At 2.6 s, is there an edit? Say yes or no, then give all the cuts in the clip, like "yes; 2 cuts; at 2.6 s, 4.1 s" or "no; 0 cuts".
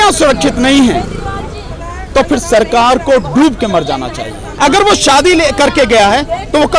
no; 1 cut; at 4.4 s